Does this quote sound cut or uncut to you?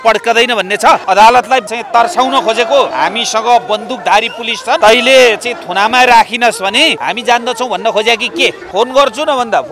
cut